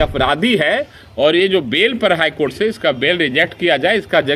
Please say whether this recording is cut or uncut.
uncut